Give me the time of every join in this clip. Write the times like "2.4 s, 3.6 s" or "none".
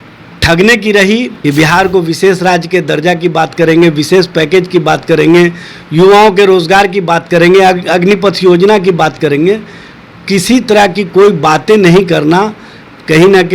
1.3 s

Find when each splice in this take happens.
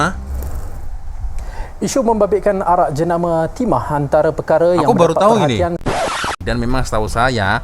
5.9 s

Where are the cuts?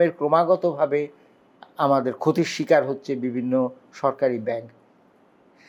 none

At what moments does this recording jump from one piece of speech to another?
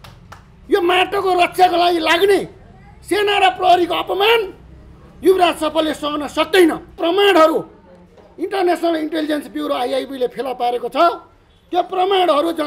7.0 s

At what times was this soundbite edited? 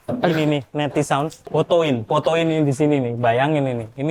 none

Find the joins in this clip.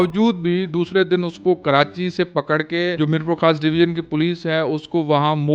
2.9 s

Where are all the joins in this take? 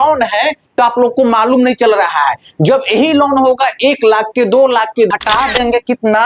5.1 s

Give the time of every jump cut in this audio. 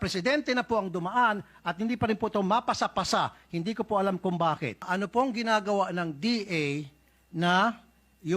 4.9 s

